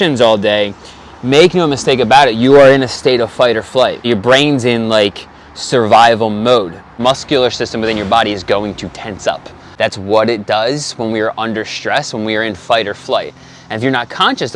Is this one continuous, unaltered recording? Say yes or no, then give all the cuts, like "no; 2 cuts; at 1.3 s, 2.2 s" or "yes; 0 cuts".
no; 3 cuts; at 4.0 s, 7.0 s, 9.6 s